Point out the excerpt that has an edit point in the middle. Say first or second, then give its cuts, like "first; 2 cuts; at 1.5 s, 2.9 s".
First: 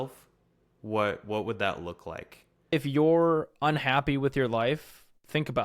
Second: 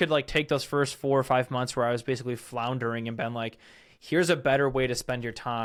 first; 1 cut; at 2.7 s